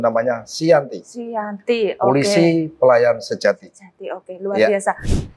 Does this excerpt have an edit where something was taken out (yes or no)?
no